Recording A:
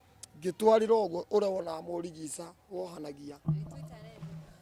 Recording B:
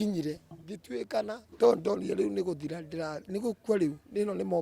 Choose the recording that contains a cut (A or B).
B